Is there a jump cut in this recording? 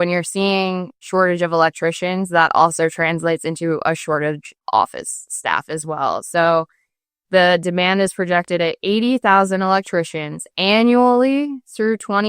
yes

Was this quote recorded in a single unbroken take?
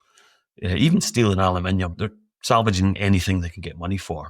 no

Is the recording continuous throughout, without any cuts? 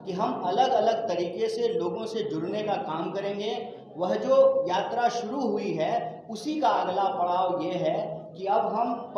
yes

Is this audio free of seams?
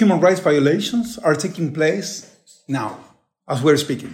yes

